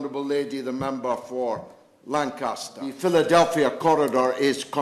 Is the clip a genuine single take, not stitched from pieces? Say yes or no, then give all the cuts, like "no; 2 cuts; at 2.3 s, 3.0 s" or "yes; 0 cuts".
no; 1 cut; at 2.9 s